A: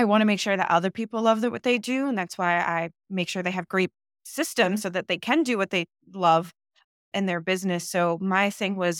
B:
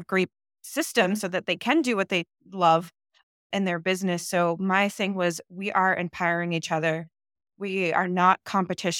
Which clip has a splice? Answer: A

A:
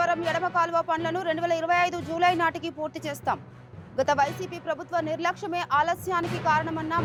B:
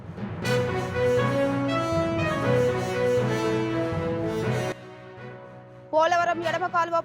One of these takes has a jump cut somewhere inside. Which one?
B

